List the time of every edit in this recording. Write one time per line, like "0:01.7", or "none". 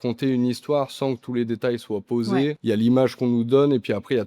0:02.6